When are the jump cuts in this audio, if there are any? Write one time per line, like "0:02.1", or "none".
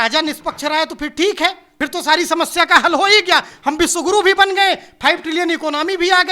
0:01.7